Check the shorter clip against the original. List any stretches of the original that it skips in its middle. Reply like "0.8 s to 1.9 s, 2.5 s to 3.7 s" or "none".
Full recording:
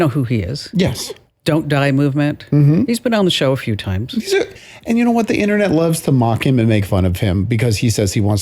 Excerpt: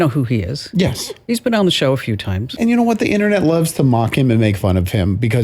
1.3 s to 2.9 s, 4.0 s to 4.7 s